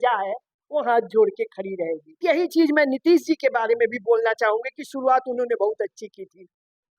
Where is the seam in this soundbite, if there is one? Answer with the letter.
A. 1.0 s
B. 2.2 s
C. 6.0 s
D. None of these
B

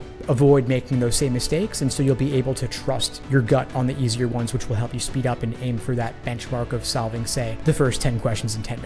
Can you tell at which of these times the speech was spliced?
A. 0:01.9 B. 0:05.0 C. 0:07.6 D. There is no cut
C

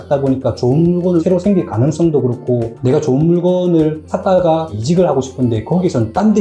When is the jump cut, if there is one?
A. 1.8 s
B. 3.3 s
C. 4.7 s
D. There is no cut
C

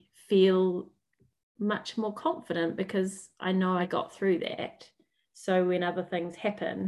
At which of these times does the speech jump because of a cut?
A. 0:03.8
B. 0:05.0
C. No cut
A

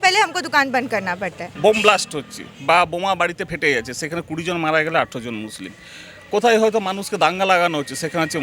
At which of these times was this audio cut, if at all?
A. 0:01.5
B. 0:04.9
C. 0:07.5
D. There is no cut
A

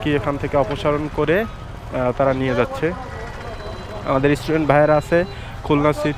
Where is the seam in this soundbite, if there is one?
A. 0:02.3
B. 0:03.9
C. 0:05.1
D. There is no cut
D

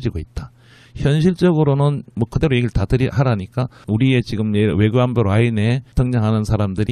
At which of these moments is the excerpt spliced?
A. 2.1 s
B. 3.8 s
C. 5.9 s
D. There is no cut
D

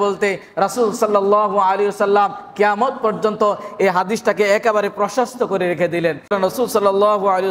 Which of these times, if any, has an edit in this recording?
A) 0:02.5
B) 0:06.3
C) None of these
B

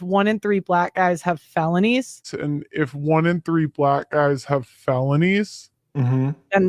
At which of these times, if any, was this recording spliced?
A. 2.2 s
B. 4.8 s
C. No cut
C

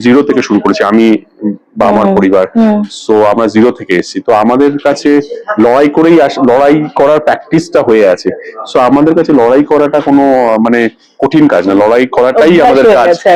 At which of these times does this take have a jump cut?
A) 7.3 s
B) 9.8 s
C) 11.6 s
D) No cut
D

